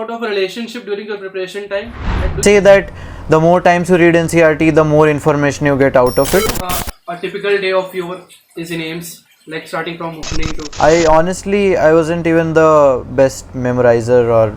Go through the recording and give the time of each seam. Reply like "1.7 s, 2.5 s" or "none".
2.2 s, 6.5 s, 10.6 s